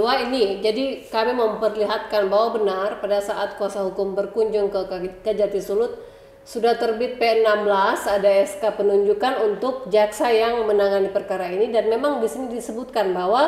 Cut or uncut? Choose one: uncut